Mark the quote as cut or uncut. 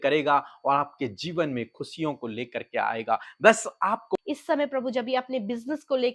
cut